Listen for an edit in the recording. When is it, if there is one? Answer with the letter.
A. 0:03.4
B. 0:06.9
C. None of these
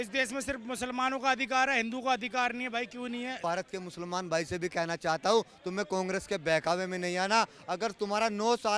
A